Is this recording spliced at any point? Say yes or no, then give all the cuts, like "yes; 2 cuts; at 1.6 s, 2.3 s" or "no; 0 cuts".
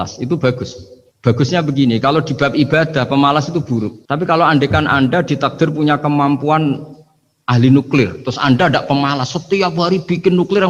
no; 0 cuts